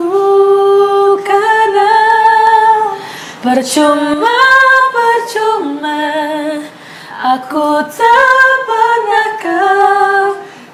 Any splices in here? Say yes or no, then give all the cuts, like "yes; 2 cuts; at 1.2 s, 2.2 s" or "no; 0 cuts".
no; 0 cuts